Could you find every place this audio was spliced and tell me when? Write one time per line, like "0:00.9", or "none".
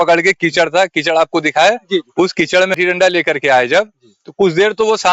0:02.8